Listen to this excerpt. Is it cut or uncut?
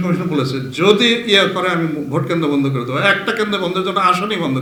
uncut